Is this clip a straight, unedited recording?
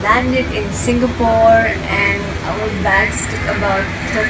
yes; 0 cuts

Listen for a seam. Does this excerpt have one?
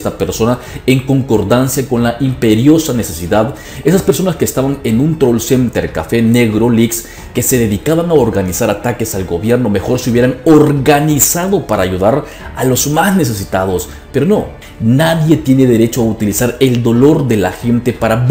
yes; 2 cuts; at 3.7 s, 14.6 s

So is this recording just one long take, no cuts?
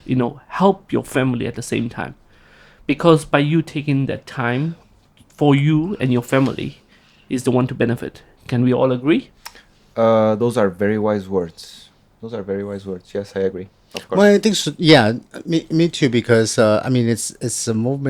yes; 0 cuts

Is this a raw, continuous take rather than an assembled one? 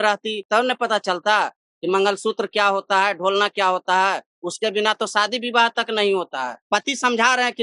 no; 1 cut; at 6.6 s

